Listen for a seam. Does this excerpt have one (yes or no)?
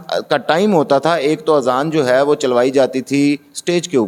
no